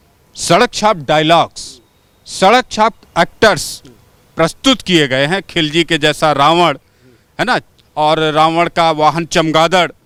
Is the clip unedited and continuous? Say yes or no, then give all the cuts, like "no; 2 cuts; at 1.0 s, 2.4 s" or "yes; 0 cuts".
yes; 0 cuts